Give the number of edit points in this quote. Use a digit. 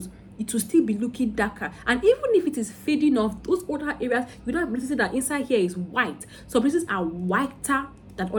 0